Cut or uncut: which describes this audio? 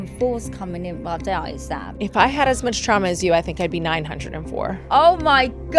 cut